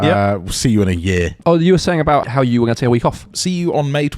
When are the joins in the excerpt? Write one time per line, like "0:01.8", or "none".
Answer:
0:01.4
0:02.3
0:03.3